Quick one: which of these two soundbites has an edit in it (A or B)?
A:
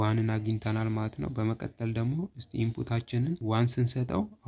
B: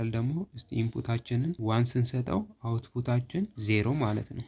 B